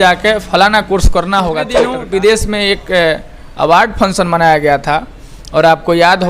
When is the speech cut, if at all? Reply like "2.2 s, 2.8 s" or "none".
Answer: 1.9 s